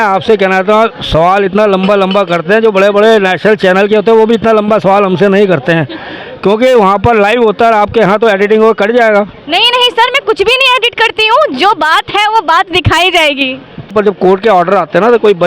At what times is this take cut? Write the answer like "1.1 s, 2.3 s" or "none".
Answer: 13.9 s